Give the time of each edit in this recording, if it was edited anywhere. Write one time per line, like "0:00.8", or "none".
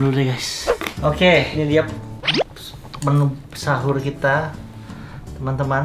none